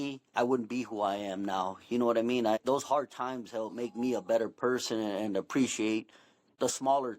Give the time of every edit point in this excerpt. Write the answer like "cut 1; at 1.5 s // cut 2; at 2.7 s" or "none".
cut 1; at 2.6 s